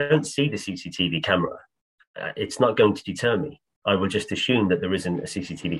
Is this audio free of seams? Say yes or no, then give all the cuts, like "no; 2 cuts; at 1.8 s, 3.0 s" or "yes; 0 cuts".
yes; 0 cuts